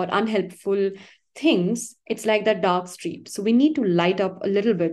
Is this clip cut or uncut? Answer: uncut